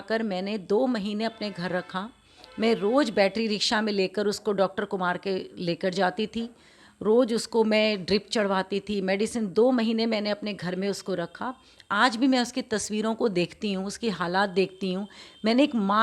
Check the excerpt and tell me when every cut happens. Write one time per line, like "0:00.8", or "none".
none